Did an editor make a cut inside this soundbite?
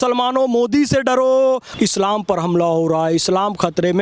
yes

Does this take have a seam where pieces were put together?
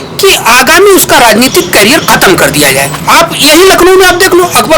yes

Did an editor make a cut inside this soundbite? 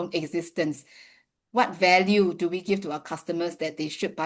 no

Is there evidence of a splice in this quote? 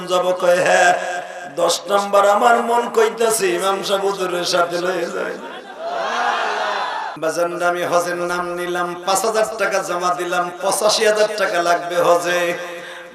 yes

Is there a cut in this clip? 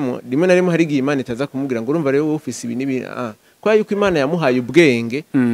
no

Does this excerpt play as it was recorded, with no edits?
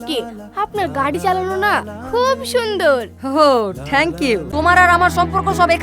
no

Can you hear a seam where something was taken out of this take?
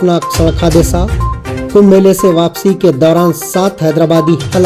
no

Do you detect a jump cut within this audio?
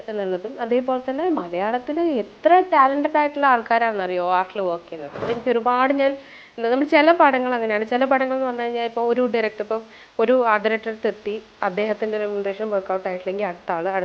yes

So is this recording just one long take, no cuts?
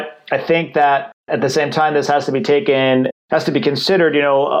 no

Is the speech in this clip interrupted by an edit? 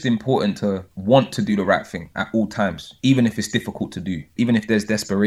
yes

